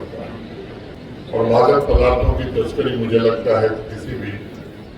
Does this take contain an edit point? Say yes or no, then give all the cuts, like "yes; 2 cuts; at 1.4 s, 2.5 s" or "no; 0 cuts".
yes; 1 cut; at 1.0 s